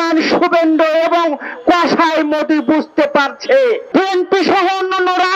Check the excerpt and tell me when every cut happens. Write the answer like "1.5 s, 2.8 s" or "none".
3.8 s